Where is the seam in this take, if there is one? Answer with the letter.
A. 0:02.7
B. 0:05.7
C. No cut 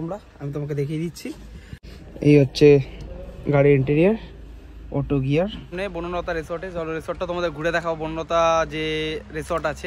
B